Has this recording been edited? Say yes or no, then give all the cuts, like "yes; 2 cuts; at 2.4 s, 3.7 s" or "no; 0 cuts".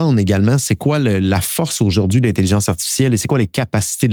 no; 0 cuts